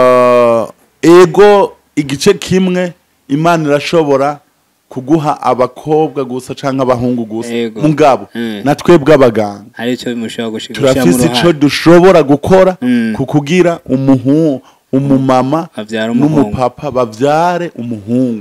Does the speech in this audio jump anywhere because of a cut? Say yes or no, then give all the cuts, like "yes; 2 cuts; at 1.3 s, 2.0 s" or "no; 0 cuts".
no; 0 cuts